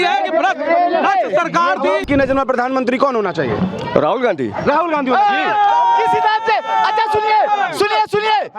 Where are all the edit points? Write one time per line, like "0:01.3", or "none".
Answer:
0:02.0